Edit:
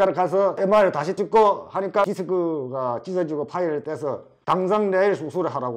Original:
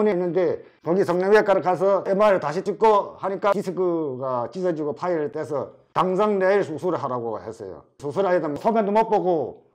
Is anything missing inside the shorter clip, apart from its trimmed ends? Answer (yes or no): no